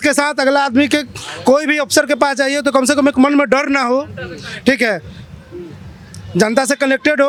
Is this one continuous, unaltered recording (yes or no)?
yes